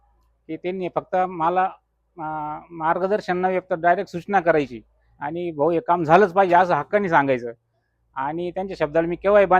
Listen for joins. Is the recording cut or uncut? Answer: uncut